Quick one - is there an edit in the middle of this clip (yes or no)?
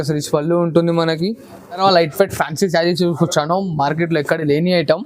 yes